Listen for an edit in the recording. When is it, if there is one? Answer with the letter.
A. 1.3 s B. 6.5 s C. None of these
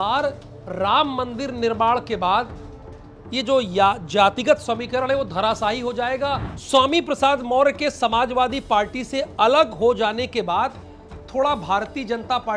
B